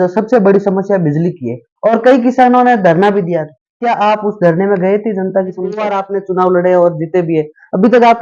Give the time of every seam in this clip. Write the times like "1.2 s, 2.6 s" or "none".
5.9 s